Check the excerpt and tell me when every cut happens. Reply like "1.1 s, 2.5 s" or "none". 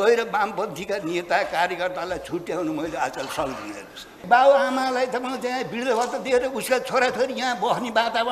4.2 s